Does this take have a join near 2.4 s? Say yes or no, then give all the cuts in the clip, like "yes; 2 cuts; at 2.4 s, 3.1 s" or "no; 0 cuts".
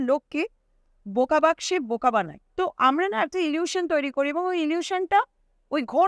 yes; 1 cut; at 2.4 s